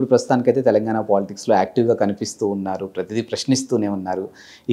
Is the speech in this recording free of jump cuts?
yes; 0 cuts

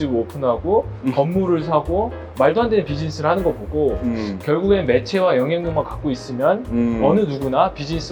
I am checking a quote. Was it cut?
no; 0 cuts

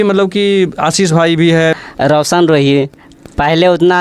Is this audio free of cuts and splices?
no; 1 cut; at 1.8 s

